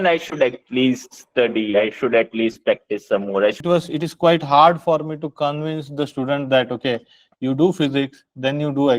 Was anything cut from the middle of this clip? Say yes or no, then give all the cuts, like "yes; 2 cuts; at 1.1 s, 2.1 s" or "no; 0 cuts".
yes; 1 cut; at 3.6 s